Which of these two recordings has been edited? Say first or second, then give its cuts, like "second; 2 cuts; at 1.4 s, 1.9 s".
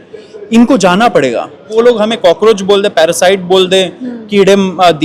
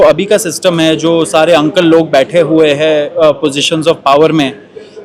first; 1 cut; at 1.7 s